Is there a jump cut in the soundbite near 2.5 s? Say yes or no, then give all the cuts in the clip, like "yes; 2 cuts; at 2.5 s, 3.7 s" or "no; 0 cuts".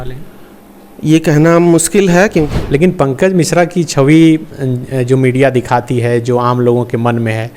yes; 1 cut; at 2.5 s